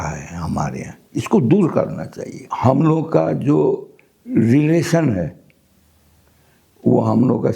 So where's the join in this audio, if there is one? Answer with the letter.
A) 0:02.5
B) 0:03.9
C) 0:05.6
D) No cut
A